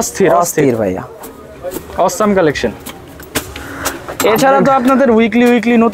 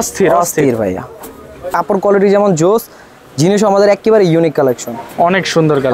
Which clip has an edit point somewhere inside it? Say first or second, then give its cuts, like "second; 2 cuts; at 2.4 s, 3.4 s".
second; 2 cuts; at 1.7 s, 5.0 s